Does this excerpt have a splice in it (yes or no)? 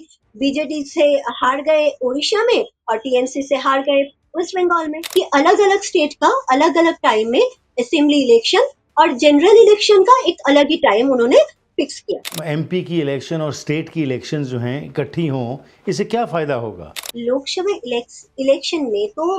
yes